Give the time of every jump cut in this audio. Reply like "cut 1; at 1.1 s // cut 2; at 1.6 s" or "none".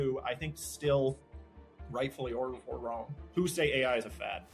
cut 1; at 3.2 s